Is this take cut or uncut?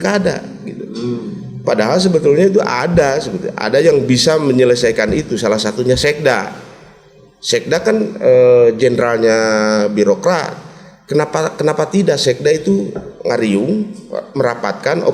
uncut